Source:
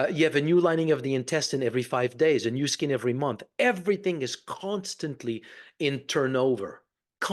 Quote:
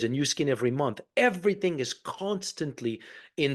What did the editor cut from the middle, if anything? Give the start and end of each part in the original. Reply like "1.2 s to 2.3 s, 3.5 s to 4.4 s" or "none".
none

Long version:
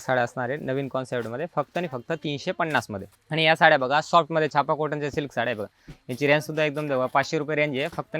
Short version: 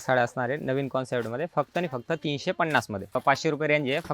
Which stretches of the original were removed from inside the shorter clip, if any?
3.2 s to 7.1 s

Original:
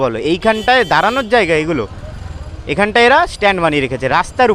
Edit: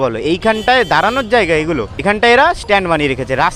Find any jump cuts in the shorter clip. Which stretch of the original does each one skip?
1.9 s to 2.7 s

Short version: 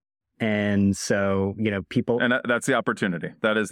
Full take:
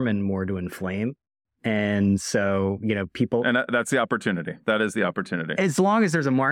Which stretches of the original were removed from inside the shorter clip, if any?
none

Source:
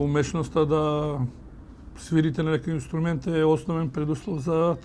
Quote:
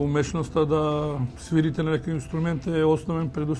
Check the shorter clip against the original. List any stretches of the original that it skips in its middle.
1.3 s to 1.9 s

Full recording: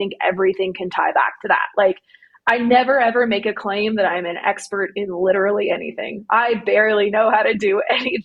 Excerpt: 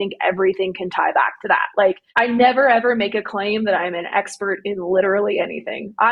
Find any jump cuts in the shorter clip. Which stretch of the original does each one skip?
2.0 s to 2.4 s

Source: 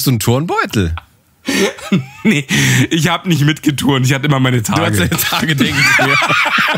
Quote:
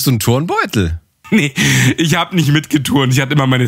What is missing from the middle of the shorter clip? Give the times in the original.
1.2 s to 2.1 s

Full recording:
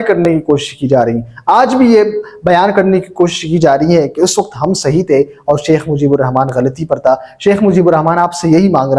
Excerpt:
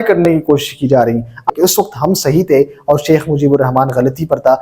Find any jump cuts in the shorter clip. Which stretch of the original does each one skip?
1.5 s to 4.1 s

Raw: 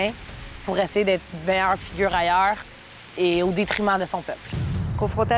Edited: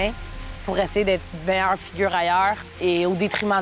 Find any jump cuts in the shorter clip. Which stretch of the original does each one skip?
2.7 s to 3.0 s

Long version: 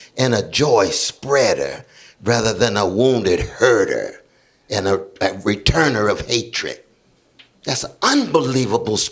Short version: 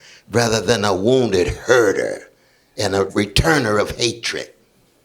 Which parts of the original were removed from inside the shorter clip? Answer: 5.0 s to 5.4 s

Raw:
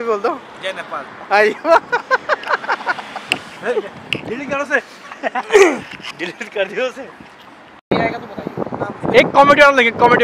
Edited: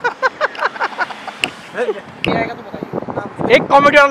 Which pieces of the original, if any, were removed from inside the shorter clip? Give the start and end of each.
4.2 s to 7.9 s

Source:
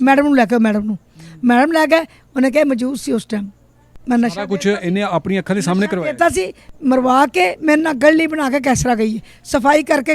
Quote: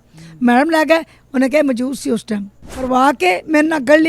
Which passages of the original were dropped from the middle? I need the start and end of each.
3.9 s to 7.0 s

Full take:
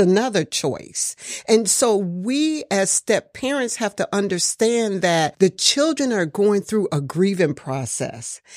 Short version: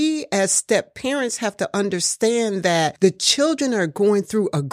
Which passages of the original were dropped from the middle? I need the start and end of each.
none

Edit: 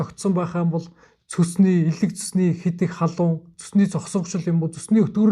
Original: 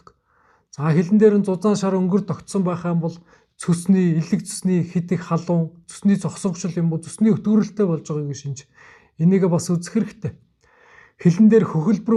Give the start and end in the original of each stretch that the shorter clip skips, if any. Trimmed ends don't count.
none

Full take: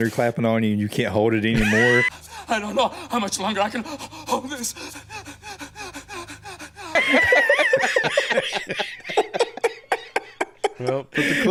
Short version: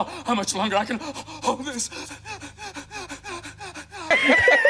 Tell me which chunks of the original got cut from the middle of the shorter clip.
none

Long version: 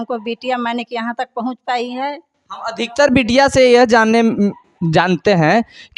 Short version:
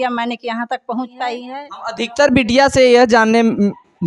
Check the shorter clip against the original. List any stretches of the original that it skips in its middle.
2.4 s to 2.8 s

